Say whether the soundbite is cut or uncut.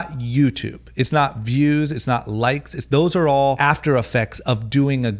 cut